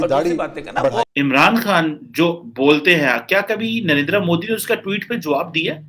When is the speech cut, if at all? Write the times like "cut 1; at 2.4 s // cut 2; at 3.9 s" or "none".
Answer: cut 1; at 1.0 s